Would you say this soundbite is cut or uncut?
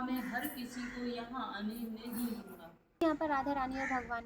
cut